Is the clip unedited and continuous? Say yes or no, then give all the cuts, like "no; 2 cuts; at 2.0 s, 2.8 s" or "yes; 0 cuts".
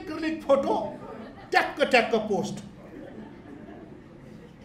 yes; 0 cuts